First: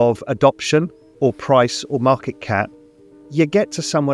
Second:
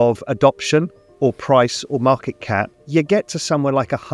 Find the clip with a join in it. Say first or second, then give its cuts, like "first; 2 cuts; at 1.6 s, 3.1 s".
second; 1 cut; at 2.8 s